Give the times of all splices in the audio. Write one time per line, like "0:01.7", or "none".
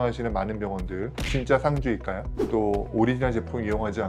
0:02.3